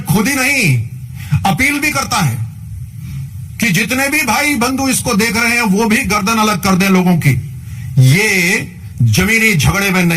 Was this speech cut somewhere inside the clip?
no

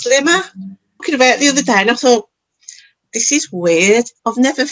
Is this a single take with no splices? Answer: no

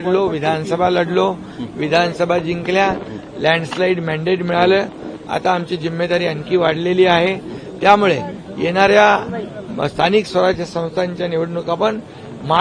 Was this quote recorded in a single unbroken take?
yes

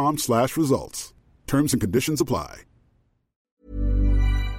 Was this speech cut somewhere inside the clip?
yes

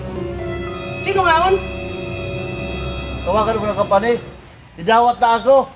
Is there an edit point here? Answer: yes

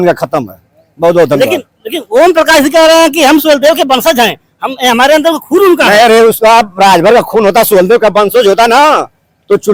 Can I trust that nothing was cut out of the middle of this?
yes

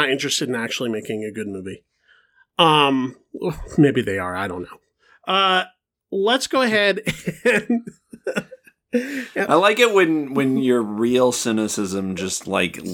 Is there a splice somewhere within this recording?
no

